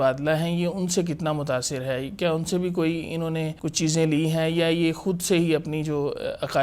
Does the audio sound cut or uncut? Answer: cut